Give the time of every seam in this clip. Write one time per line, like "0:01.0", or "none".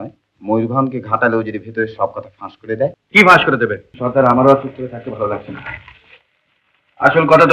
0:03.0
0:03.8